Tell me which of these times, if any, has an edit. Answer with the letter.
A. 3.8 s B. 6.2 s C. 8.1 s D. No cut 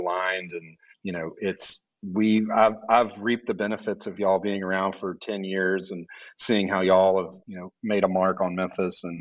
D